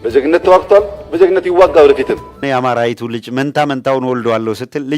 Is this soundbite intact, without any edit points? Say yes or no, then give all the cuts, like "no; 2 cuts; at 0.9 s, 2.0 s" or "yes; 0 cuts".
no; 1 cut; at 2.4 s